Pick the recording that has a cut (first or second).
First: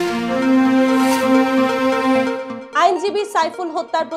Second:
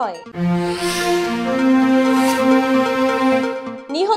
first